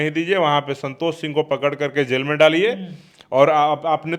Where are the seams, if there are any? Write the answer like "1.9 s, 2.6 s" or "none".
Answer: none